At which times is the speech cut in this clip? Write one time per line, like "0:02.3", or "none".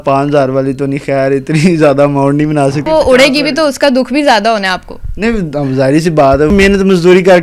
0:02.8
0:06.5